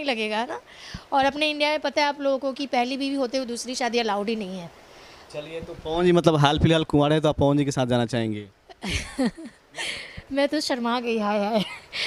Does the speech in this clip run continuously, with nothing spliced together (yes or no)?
yes